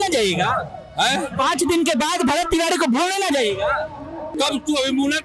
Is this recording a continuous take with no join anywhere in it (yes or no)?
no